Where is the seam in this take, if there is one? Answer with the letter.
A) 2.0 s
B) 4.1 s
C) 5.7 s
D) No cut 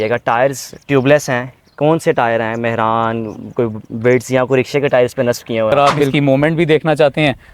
C